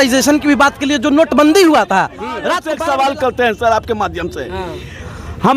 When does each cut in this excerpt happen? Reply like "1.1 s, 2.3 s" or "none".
2.6 s